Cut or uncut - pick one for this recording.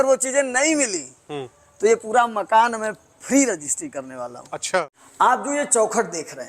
cut